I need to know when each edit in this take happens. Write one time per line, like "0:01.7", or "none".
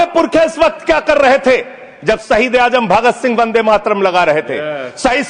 none